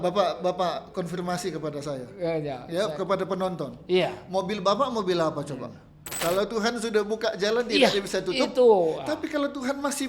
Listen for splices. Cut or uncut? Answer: cut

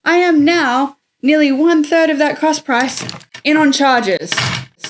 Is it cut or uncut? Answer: uncut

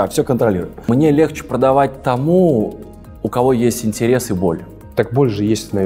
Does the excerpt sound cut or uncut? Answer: cut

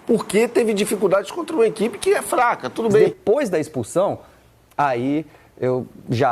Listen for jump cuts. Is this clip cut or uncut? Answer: cut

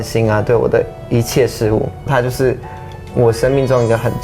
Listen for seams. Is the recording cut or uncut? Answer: cut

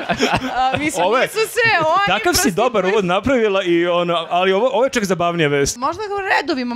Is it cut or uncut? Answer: cut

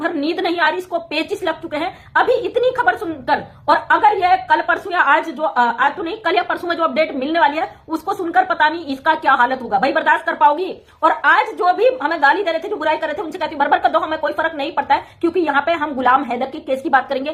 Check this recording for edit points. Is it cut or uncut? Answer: uncut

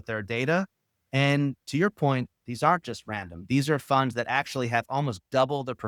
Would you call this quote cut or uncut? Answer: uncut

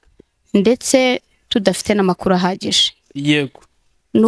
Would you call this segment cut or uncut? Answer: uncut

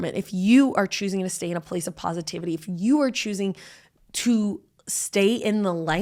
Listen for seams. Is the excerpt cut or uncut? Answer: uncut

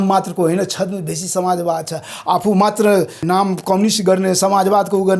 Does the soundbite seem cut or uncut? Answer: cut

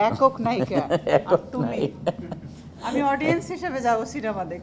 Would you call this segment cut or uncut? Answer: uncut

